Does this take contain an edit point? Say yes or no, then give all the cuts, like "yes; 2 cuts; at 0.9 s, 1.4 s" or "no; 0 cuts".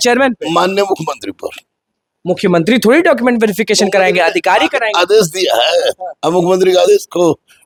no; 0 cuts